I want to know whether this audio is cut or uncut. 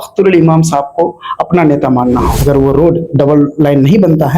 cut